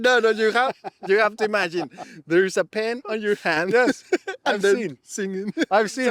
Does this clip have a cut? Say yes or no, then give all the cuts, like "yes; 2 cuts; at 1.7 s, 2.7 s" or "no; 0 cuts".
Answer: no; 0 cuts